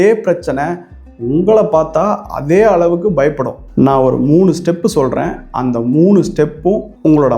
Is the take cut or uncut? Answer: cut